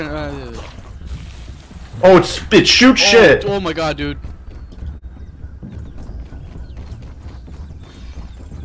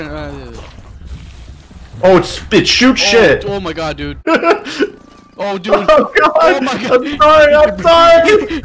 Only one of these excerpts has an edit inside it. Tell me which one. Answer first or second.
second